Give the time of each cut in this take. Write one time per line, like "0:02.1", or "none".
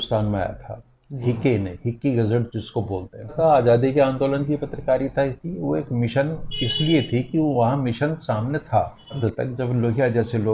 0:03.4
0:09.2